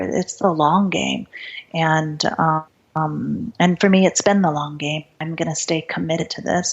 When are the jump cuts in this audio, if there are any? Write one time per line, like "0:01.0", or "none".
0:02.8
0:05.1